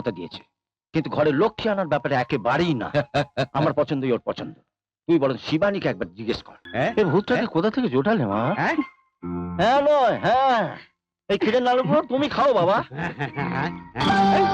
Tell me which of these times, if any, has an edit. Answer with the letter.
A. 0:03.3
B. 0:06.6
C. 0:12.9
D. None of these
B